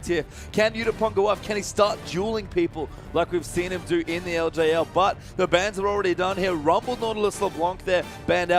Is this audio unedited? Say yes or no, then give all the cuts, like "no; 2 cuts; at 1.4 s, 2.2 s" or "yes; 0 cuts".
yes; 0 cuts